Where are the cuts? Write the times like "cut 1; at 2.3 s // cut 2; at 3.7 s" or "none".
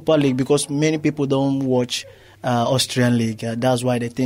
none